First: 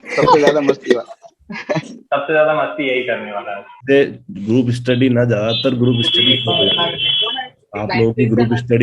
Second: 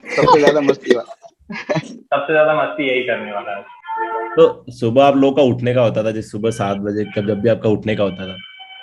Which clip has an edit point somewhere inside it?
first; 1 cut; at 3.7 s

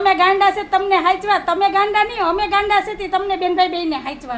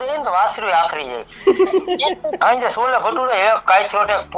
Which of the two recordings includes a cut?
second; 1 cut; at 2.4 s

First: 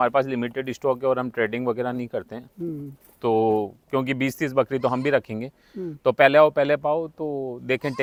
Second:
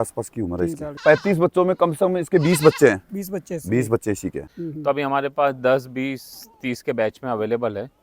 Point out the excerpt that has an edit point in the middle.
second; 2 cuts; at 0.9 s, 4.5 s

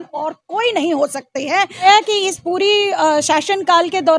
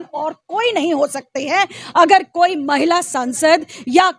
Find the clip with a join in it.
first; 1 cut; at 1.8 s

